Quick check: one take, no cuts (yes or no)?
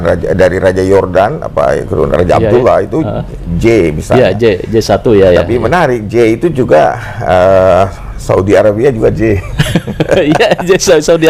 yes